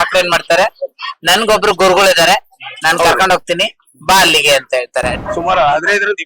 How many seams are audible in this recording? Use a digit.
1